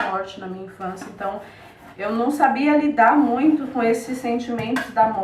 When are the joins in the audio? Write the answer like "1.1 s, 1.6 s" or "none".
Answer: none